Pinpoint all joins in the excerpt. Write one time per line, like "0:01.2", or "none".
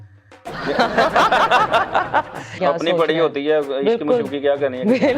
0:02.5